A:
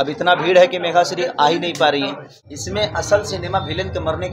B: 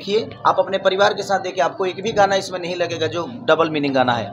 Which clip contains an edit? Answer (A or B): A